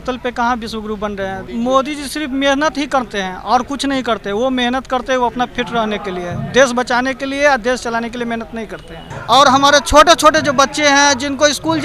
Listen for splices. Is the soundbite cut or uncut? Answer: cut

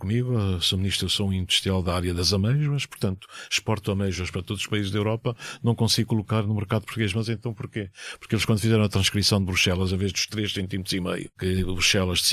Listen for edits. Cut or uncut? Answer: cut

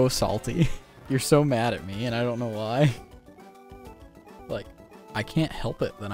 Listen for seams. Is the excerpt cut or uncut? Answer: cut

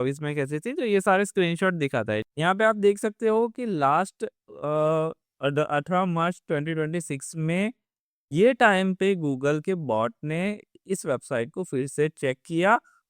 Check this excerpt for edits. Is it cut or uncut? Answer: cut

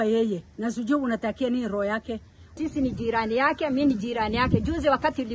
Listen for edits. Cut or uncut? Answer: cut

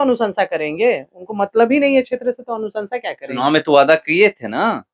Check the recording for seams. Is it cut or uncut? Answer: uncut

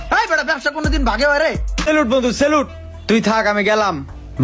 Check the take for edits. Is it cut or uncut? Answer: cut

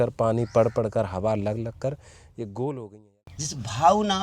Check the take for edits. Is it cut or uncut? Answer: cut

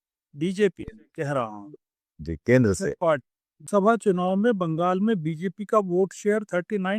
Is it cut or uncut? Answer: cut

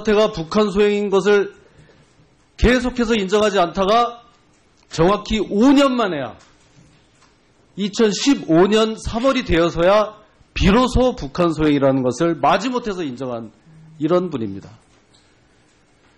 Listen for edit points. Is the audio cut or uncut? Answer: cut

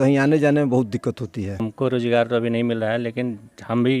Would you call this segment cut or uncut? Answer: cut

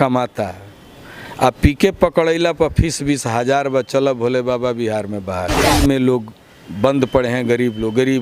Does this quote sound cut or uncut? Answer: cut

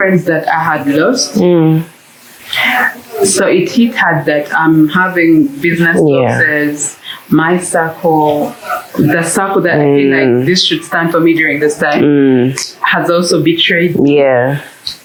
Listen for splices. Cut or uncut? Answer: uncut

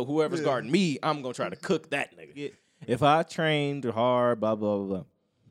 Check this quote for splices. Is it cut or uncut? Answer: cut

